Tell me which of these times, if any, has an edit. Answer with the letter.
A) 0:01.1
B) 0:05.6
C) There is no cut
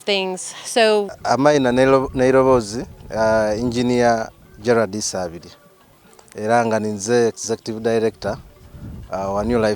A